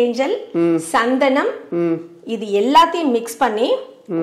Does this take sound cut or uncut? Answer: uncut